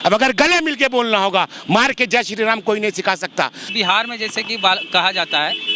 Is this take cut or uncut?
cut